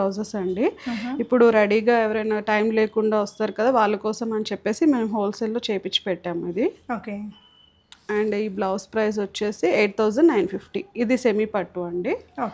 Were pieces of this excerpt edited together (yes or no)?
no